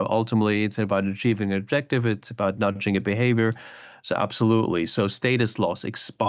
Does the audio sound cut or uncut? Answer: uncut